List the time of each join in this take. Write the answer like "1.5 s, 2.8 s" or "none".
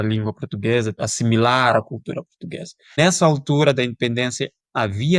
0.9 s, 3.0 s